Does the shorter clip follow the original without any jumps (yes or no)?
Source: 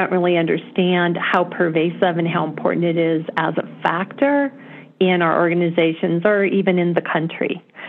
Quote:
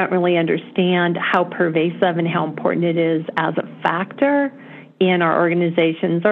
yes